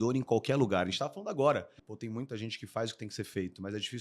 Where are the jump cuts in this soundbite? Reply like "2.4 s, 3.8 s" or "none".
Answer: 1.8 s